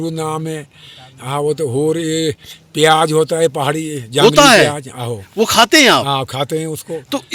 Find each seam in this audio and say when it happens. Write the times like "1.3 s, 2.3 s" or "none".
none